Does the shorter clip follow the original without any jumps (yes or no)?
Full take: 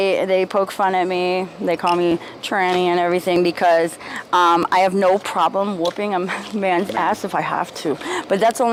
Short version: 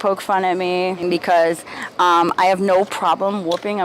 no